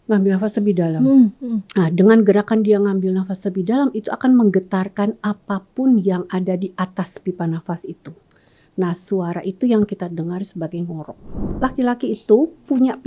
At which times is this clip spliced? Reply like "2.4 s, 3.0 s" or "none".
11.5 s